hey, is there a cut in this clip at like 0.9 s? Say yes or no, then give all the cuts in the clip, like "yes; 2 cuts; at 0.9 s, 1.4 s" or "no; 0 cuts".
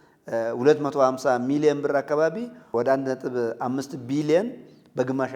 no; 1 cut; at 2.5 s